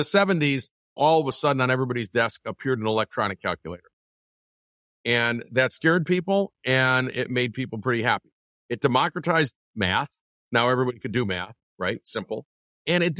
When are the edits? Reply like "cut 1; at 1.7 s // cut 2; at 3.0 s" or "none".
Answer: cut 1; at 1.0 s